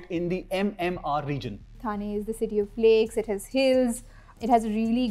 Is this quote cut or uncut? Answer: cut